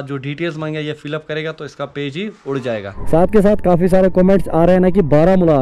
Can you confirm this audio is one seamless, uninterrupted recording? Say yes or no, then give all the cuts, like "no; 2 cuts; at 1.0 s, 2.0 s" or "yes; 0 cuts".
no; 1 cut; at 2.9 s